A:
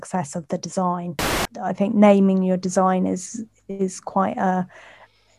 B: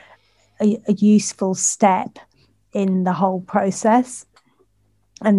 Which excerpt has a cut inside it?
A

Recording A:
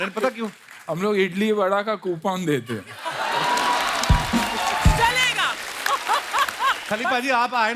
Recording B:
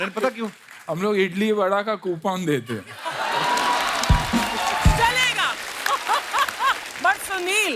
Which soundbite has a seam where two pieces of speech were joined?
A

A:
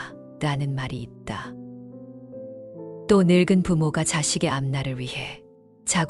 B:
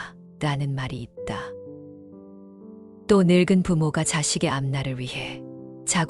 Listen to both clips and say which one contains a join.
B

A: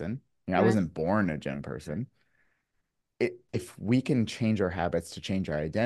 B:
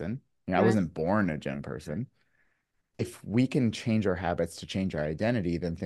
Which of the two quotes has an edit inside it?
B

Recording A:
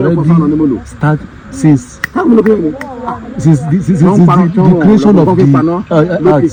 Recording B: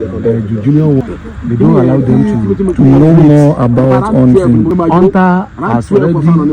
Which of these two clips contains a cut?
B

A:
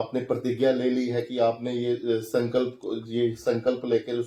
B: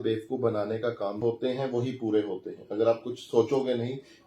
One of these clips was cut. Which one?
B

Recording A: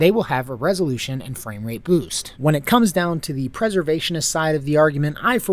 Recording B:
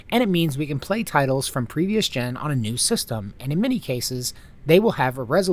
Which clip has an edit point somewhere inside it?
A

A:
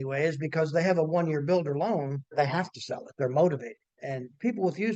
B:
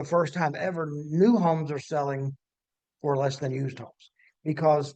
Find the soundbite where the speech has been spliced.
A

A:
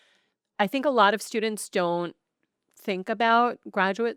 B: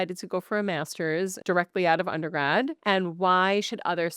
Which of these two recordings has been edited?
B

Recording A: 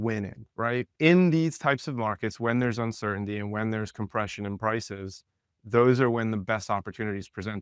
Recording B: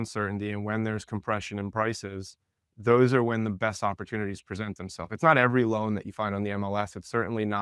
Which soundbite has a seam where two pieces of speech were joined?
A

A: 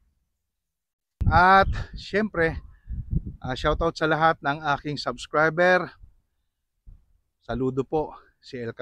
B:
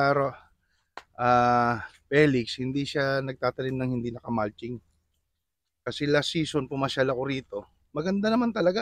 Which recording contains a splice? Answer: A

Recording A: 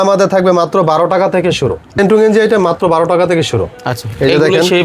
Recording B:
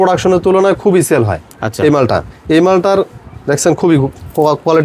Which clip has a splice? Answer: A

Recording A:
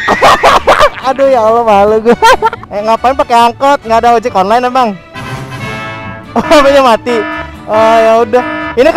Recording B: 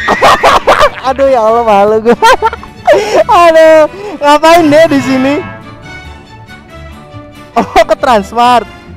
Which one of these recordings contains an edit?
A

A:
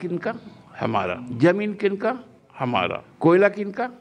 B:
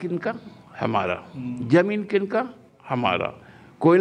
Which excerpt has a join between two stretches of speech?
A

